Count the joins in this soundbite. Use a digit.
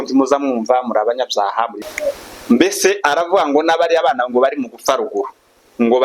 1